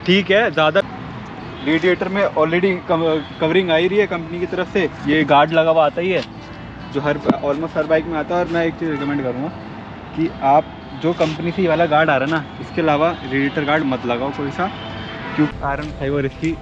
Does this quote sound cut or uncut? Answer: cut